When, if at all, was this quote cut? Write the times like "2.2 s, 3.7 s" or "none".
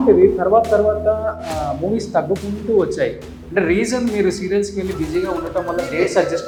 none